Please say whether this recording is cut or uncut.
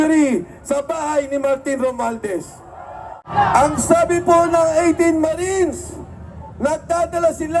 cut